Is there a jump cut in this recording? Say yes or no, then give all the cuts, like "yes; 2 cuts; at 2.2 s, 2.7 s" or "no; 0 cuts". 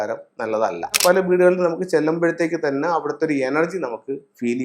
yes; 1 cut; at 1.0 s